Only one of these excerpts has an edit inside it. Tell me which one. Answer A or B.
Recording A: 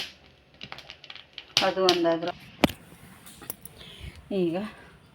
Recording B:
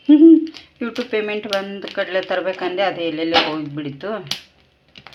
A